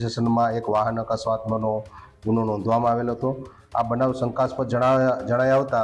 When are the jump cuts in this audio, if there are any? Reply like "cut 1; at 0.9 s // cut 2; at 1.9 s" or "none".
cut 1; at 3.5 s